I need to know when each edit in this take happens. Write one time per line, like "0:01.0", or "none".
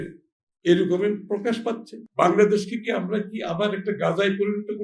0:02.0